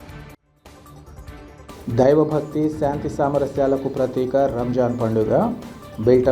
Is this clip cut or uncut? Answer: cut